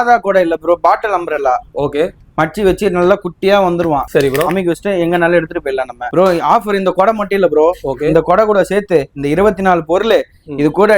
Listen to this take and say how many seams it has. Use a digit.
2